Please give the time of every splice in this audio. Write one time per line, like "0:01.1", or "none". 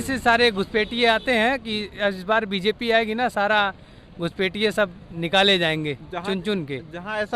none